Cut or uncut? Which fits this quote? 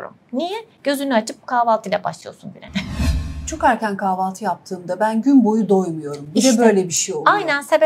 uncut